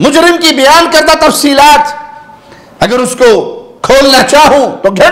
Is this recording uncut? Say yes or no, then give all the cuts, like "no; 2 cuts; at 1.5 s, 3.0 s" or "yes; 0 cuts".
yes; 0 cuts